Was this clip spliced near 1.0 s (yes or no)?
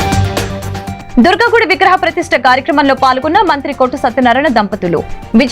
yes